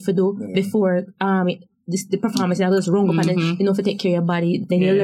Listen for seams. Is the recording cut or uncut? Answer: uncut